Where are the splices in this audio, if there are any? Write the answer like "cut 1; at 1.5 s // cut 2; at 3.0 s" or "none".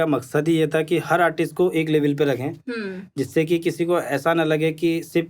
none